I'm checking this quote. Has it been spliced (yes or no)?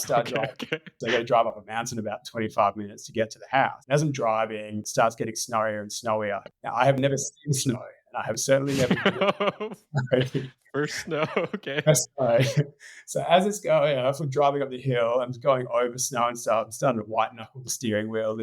yes